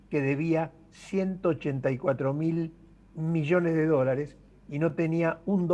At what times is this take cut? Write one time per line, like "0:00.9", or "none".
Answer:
none